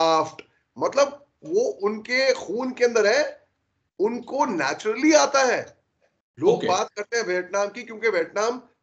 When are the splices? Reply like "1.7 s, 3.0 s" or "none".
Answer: none

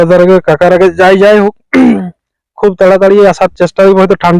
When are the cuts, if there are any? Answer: none

